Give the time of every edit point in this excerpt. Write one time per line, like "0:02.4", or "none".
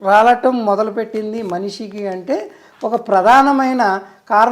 none

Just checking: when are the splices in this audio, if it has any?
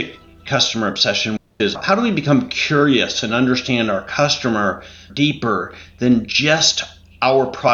0:01.4
0:05.0

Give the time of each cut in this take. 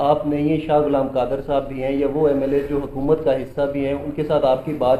none

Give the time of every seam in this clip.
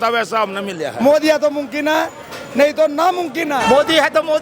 0:00.9
0:03.6

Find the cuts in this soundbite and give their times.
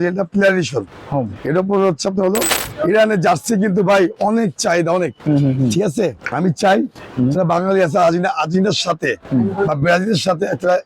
0:02.6
0:06.2

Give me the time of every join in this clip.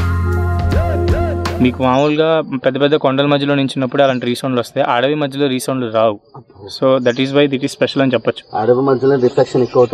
0:01.5

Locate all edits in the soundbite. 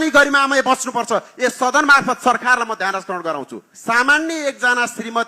0:04.0

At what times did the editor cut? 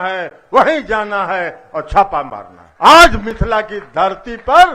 0:02.6

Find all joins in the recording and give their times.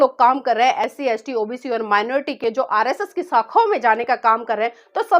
none

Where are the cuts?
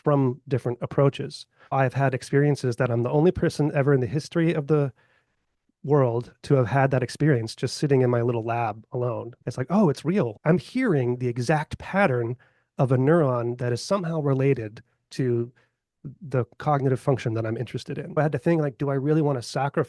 0:01.7
0:09.3
0:10.3
0:18.2

